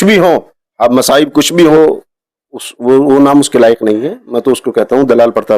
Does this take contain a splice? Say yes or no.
yes